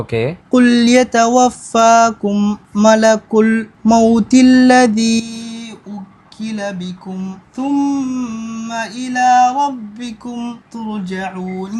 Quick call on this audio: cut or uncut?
uncut